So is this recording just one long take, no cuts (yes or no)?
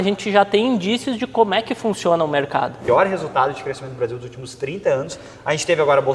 no